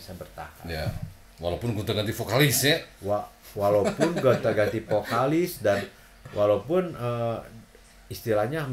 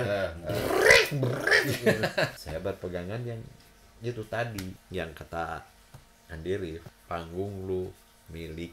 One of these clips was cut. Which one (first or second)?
second